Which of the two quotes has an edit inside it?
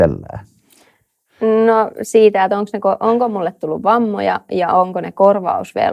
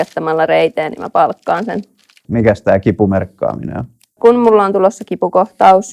second; 2 cuts; at 2.2 s, 4.1 s

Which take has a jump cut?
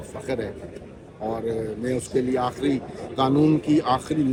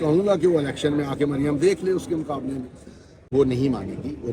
second; 1 cut; at 3.2 s

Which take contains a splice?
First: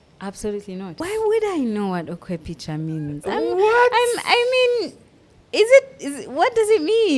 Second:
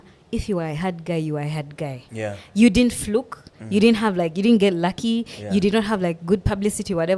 first; 1 cut; at 1.0 s

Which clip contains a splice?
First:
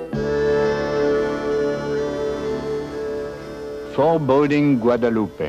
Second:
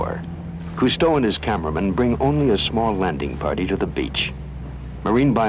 first; 1 cut; at 1.5 s

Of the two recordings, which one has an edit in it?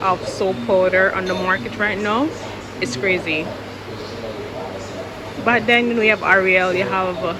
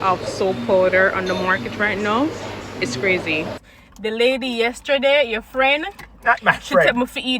second; 1 cut; at 3.7 s

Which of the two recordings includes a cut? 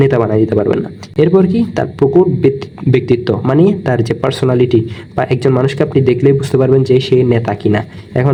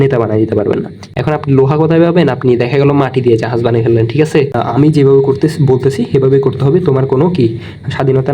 second; 2 cuts; at 1.0 s, 4.6 s

